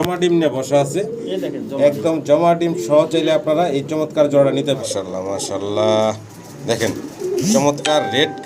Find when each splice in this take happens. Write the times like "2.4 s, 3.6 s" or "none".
4.8 s